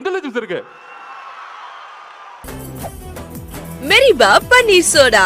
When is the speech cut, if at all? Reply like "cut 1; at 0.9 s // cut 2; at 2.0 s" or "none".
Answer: cut 1; at 2.4 s

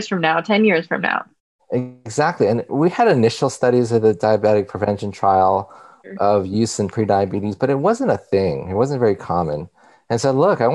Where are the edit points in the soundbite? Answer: cut 1; at 2.7 s // cut 2; at 6.0 s

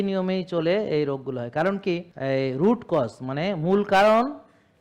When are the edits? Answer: cut 1; at 2.1 s

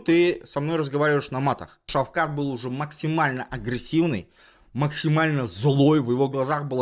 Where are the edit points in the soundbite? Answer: cut 1; at 1.8 s

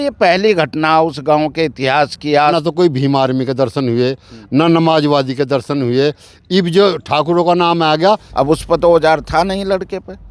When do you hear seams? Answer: cut 1; at 2.5 s // cut 2; at 8.3 s

